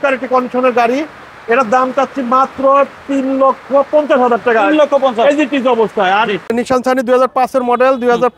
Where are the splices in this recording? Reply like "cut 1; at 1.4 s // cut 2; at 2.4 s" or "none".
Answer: cut 1; at 6.5 s